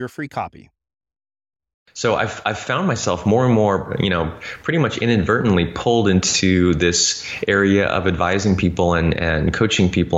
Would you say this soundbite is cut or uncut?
cut